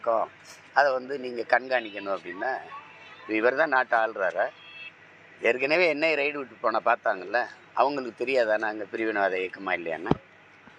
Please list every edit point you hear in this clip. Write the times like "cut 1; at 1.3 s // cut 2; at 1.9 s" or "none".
none